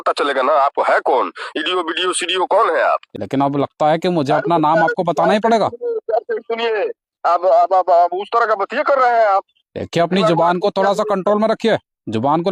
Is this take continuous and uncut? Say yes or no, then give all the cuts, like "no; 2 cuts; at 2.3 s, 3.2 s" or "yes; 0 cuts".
no; 1 cut; at 3.2 s